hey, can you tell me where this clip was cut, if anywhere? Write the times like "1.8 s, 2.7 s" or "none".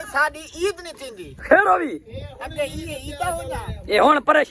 none

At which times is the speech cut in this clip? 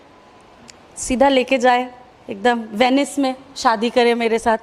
3.6 s

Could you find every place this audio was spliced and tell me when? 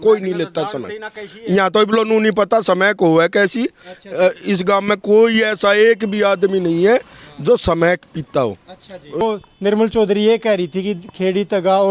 9.2 s

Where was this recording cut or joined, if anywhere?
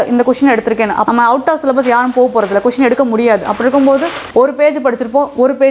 1.0 s, 4.2 s

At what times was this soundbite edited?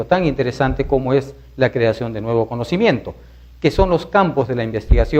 none

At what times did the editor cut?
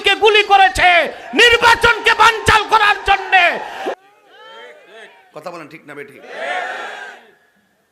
3.9 s

